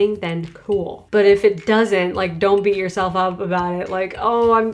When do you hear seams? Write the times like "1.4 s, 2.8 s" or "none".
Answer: 1.0 s